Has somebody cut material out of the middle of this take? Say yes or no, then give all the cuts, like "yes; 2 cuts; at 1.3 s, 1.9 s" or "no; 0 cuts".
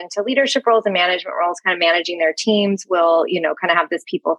no; 0 cuts